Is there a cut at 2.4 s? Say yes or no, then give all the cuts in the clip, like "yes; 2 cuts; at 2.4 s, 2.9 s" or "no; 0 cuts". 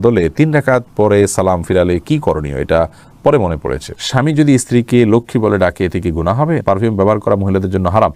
no; 2 cuts; at 3.9 s, 6.6 s